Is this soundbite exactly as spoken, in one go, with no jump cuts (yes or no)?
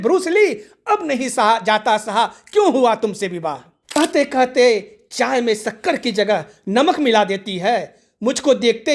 no